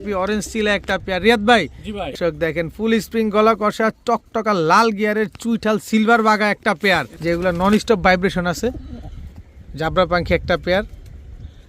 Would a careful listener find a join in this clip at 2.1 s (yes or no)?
yes